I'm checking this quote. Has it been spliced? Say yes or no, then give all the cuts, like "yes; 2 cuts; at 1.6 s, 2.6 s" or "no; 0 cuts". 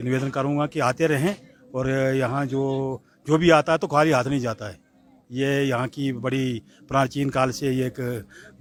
no; 0 cuts